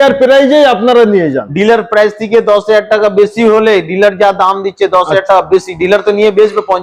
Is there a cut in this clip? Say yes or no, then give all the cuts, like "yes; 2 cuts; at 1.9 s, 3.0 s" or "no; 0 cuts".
no; 0 cuts